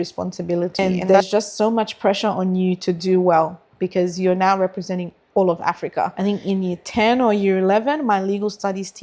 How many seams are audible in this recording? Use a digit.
2